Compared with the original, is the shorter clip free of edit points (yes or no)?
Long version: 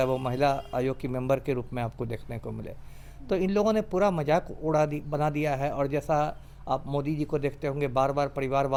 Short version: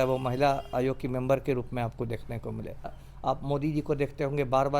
no